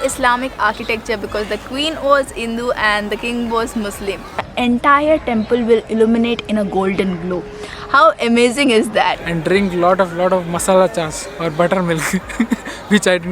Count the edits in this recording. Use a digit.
2